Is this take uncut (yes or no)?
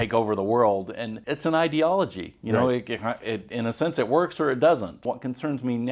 no